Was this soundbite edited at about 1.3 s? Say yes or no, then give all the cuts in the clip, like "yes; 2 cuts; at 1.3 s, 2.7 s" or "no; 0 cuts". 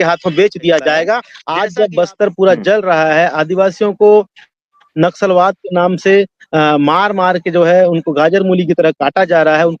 yes; 1 cut; at 1.3 s